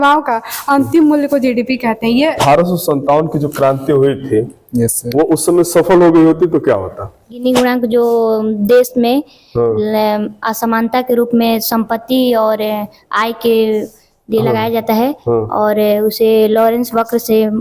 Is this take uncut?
no; 2 cuts; at 2.4 s, 7.4 s

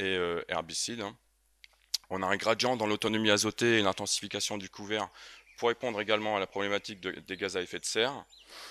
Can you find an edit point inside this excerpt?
no; 0 cuts

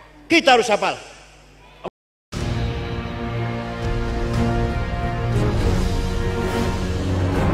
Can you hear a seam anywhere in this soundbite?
yes; 1 cut; at 1.9 s

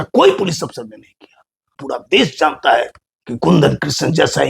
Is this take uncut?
no; 1 cut; at 1.7 s

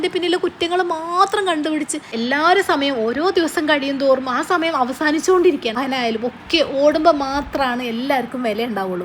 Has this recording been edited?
yes; 2 cuts; at 2.2 s, 5.8 s

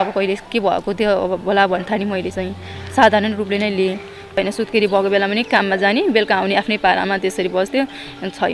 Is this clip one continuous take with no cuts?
no; 1 cut; at 4.4 s

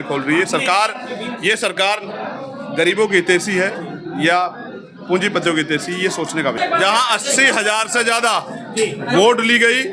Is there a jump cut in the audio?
yes; 1 cut; at 6.6 s

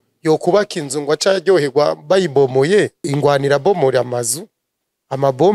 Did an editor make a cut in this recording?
yes; 1 cut; at 3.1 s

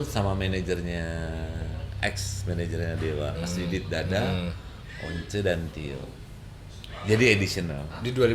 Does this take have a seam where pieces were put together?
no; 0 cuts

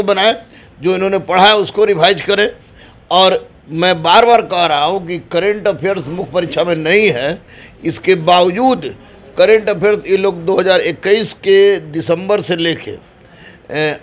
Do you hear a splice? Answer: no; 0 cuts

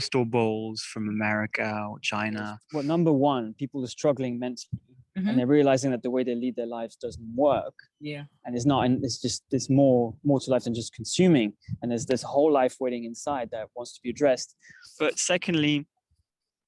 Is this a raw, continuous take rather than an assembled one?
no; 1 cut; at 2.6 s

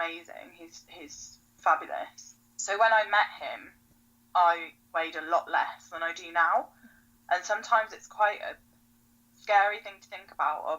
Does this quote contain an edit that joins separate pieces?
yes; 1 cut; at 2.2 s

